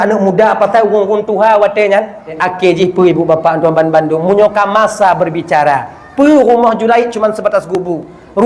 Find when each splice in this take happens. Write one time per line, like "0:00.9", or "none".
0:02.4